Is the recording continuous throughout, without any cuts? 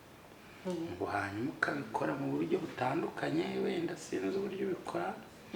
yes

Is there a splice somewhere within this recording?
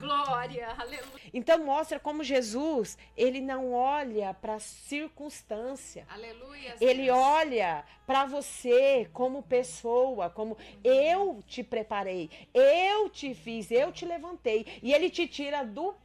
yes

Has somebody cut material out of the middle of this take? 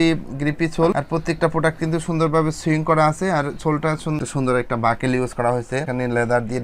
yes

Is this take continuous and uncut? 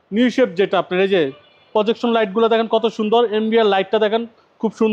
yes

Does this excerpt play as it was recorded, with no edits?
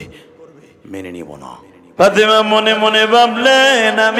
no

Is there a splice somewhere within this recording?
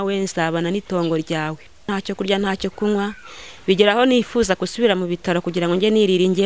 yes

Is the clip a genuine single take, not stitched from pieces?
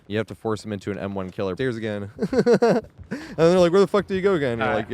no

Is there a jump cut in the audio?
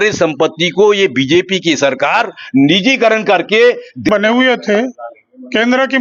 yes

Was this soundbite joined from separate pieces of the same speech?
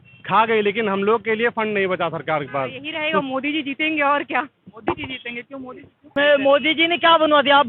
yes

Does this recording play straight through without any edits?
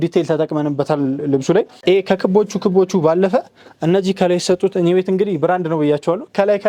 yes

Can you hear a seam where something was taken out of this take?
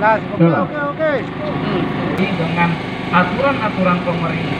yes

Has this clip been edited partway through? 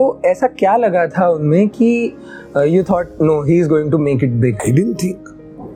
no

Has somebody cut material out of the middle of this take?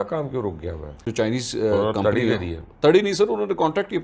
yes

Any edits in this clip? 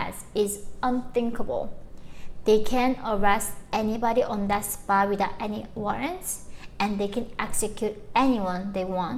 no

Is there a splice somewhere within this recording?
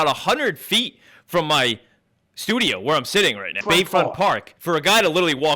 yes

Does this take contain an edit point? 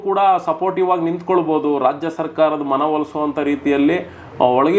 no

